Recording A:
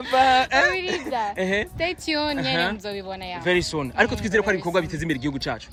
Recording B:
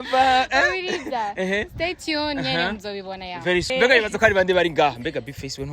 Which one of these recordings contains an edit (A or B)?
B